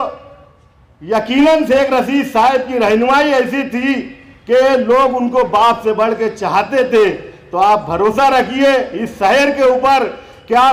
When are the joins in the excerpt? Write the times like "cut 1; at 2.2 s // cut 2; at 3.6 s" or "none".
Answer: none